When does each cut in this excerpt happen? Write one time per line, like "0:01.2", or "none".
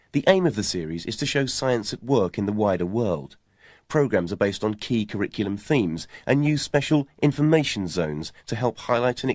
0:08.3